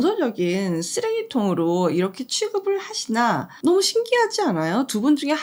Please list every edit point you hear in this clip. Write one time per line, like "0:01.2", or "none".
none